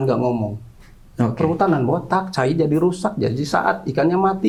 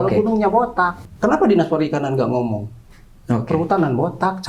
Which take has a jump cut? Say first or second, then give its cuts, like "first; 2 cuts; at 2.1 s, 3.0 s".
second; 1 cut; at 1.0 s